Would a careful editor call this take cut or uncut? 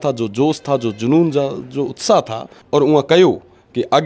cut